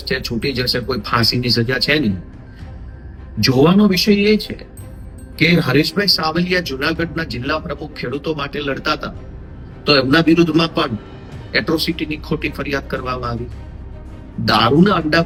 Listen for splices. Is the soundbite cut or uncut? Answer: uncut